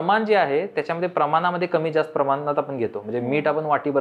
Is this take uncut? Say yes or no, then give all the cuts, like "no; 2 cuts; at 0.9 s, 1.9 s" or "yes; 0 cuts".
yes; 0 cuts